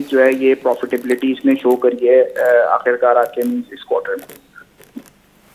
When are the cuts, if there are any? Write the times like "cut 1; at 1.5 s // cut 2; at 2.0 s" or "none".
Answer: none